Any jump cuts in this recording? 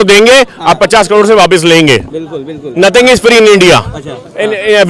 no; 0 cuts

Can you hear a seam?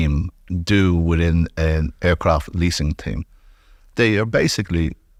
no; 0 cuts

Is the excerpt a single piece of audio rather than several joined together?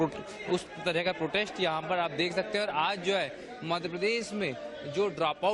yes; 0 cuts

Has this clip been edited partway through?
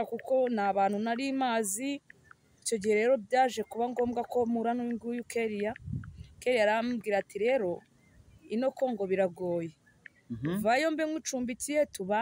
no; 0 cuts

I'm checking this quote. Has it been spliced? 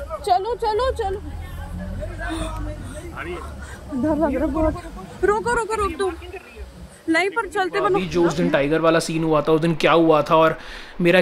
yes; 1 cut; at 8.1 s

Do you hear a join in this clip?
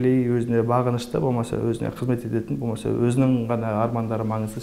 no; 0 cuts

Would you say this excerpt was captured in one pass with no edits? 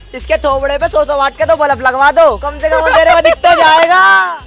yes; 0 cuts

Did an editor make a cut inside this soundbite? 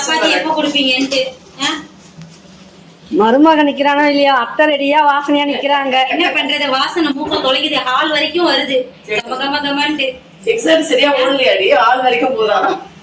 no; 0 cuts

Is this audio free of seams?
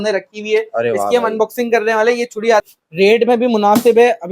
no; 1 cut; at 2.7 s

